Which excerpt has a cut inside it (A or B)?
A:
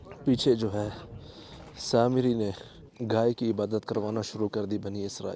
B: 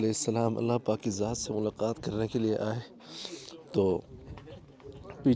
A